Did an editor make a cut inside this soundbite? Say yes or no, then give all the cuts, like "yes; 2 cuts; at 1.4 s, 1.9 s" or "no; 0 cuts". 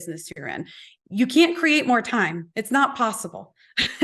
yes; 1 cut; at 2.5 s